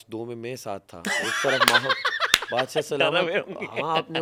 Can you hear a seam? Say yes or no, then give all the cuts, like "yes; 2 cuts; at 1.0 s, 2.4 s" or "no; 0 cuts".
no; 0 cuts